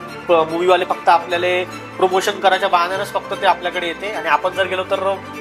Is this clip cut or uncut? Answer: uncut